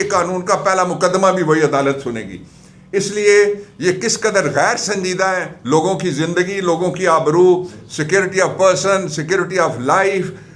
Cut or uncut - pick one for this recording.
uncut